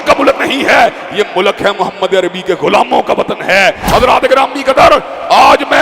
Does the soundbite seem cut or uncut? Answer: cut